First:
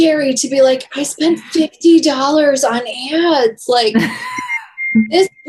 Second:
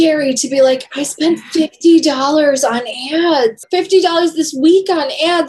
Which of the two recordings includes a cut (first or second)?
second